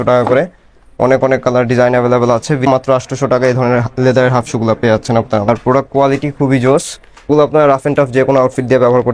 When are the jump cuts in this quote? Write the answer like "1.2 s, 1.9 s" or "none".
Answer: 2.7 s, 5.5 s, 7.3 s